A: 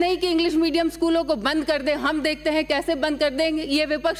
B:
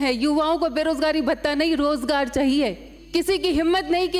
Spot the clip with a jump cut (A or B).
B